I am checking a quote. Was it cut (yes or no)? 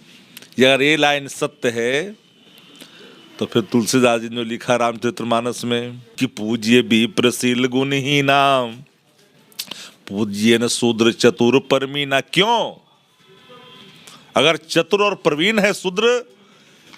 yes